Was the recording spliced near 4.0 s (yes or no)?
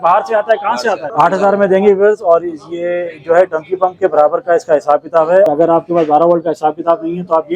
no